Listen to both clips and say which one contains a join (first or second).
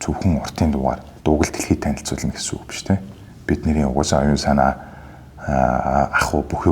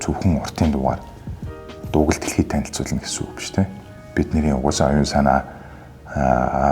first